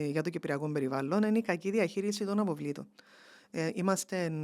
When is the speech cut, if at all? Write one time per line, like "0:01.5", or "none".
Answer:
none